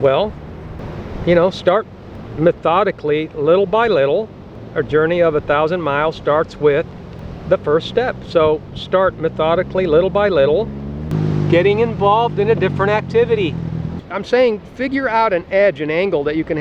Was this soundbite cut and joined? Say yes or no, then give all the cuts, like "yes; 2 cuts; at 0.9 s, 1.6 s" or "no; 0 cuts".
yes; 1 cut; at 14.0 s